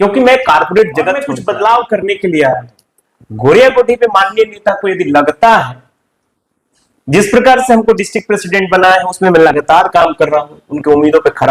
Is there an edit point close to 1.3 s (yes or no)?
yes